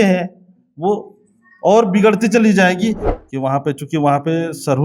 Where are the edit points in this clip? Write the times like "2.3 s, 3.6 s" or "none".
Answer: 3.0 s

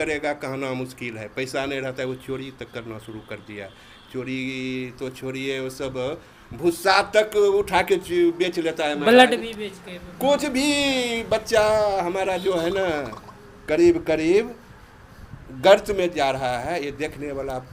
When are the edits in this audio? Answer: none

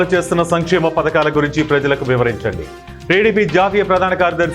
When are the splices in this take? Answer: none

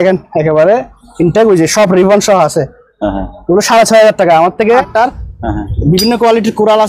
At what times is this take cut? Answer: 4.7 s

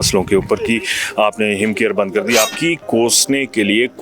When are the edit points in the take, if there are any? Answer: 2.5 s

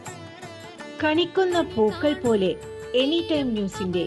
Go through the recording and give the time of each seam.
1.0 s

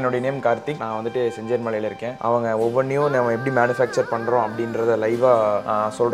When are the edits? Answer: 2.2 s

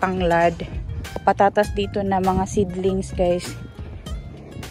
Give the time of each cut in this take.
1.2 s

